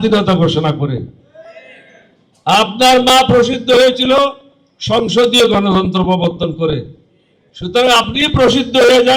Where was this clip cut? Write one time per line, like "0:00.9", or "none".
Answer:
none